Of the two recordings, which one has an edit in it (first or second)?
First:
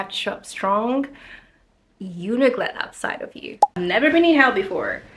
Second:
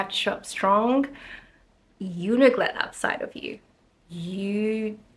first